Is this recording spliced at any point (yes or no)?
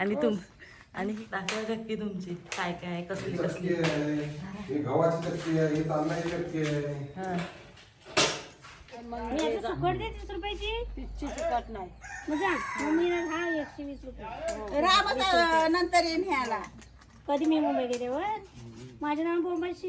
yes